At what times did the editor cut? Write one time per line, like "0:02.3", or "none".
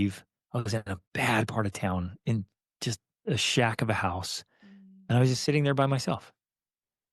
0:01.0